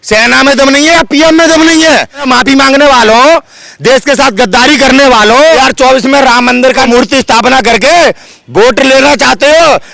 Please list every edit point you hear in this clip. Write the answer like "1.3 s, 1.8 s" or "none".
2.2 s, 5.6 s, 6.9 s

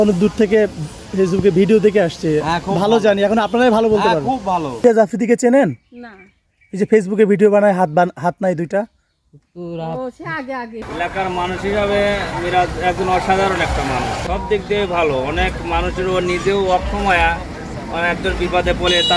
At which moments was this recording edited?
4.8 s, 10.8 s, 14.2 s

